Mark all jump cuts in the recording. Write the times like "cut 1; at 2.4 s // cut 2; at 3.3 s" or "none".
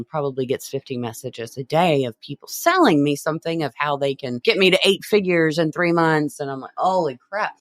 cut 1; at 4.4 s